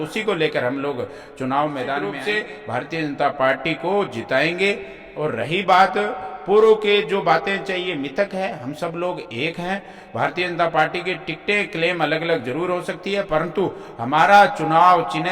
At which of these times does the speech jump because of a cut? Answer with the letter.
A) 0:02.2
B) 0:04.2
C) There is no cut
A